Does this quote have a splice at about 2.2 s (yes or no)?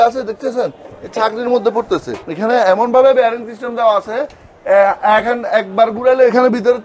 yes